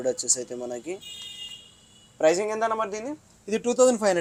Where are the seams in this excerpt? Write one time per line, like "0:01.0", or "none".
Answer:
none